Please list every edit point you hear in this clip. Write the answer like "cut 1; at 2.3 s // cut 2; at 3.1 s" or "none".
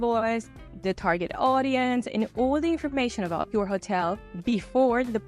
cut 1; at 3.5 s